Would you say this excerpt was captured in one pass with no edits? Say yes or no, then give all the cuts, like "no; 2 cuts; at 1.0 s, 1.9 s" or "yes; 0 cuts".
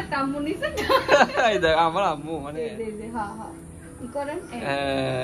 no; 1 cut; at 2.7 s